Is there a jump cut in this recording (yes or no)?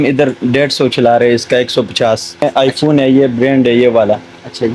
yes